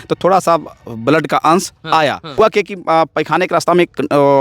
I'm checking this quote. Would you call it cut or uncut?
cut